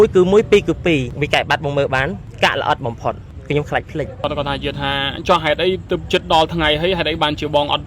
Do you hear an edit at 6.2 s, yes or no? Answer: no